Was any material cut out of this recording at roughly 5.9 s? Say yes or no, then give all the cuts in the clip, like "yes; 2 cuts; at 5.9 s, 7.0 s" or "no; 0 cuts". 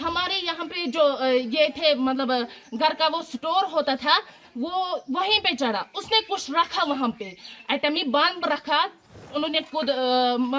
no; 1 cut; at 9.2 s